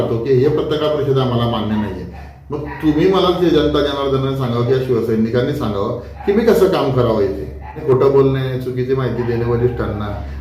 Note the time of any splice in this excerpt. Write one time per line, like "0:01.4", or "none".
0:07.8